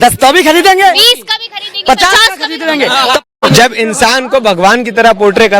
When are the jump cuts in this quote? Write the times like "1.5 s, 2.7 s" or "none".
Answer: 3.3 s